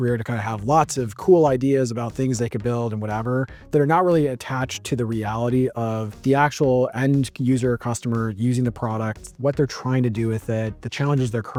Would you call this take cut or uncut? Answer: uncut